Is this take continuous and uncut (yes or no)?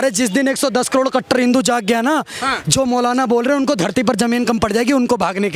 yes